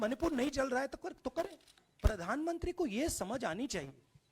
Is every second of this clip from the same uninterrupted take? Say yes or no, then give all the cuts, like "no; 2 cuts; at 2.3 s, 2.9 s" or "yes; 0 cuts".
no; 1 cut; at 1.8 s